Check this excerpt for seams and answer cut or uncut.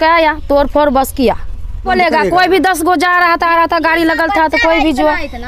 cut